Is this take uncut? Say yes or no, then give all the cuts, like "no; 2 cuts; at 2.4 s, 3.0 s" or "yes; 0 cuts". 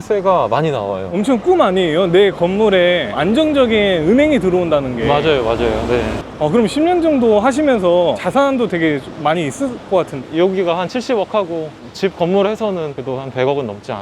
no; 1 cut; at 1.1 s